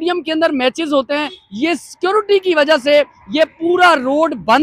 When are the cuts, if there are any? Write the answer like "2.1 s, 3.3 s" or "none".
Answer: none